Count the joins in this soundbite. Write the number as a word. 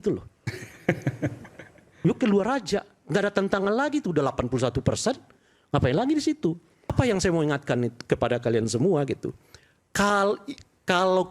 one